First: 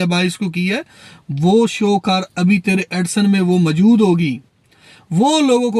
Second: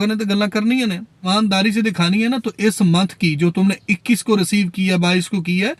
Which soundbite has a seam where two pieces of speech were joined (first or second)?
second